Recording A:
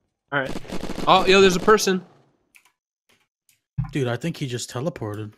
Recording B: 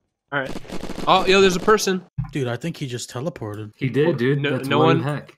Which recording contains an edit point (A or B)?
B